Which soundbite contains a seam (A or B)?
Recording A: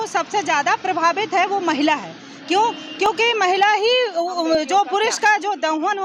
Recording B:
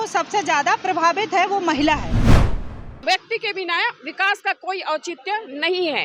B